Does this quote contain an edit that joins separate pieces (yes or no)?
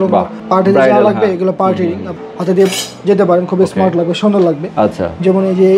no